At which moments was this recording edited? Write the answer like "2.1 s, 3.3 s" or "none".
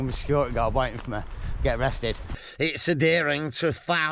2.4 s